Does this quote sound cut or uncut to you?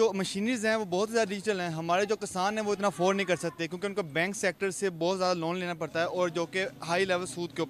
uncut